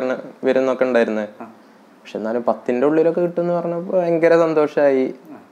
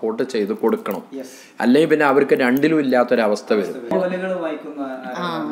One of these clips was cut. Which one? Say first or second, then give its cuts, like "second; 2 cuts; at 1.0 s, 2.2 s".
second; 1 cut; at 3.9 s